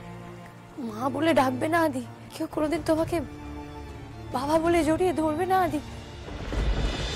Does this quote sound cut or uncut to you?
cut